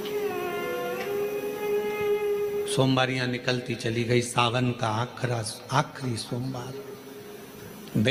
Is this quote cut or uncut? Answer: uncut